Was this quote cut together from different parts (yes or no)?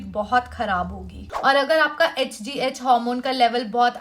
yes